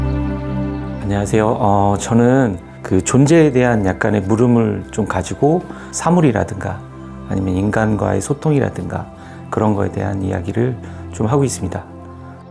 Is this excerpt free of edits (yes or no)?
yes